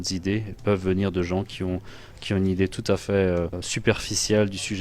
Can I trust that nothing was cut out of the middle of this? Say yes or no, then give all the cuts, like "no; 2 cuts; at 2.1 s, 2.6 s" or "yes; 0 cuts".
no; 1 cut; at 3.7 s